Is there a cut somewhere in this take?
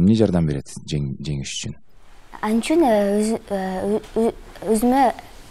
no; 0 cuts

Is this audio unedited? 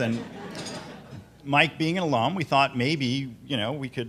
yes; 0 cuts

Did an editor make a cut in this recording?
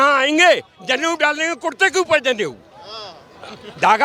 no; 0 cuts

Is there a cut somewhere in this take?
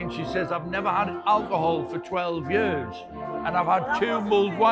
no; 0 cuts

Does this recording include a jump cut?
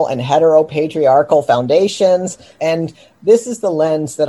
yes; 1 cut; at 2.5 s

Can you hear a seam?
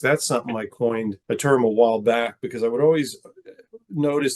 yes; 1 cut; at 1.2 s

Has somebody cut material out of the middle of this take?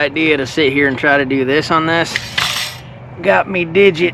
no; 0 cuts

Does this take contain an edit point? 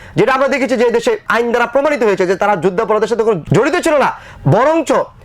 yes; 2 cuts; at 1.2 s, 3.4 s

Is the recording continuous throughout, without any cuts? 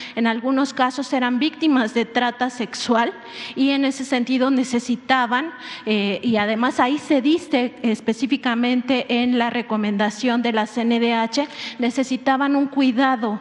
yes; 0 cuts

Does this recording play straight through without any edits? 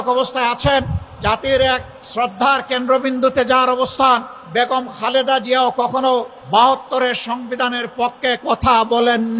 no; 4 cuts; at 1.0 s, 2.0 s, 4.4 s, 6.4 s

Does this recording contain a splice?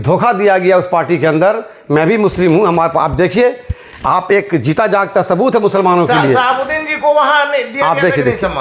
no; 0 cuts

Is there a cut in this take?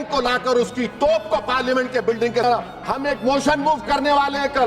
yes; 1 cut; at 2.4 s

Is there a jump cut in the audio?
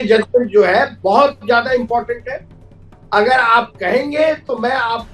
no; 0 cuts

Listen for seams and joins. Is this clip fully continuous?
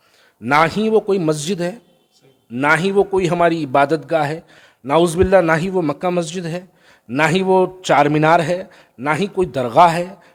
yes; 0 cuts

